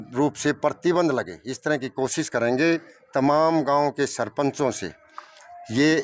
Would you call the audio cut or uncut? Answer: uncut